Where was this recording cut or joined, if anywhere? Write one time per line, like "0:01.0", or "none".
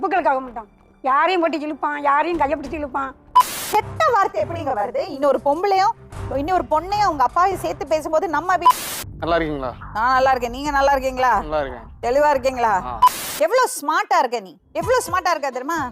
0:03.2
0:08.8
0:13.3